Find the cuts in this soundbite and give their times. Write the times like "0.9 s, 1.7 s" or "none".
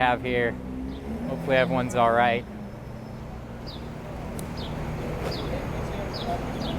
none